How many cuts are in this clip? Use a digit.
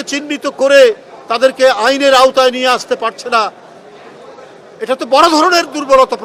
0